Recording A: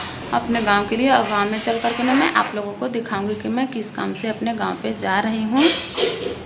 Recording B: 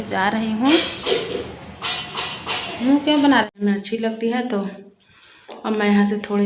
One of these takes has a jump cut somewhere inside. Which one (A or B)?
B